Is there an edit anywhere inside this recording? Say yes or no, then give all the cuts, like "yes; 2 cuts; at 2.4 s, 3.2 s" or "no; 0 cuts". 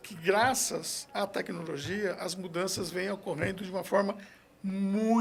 no; 0 cuts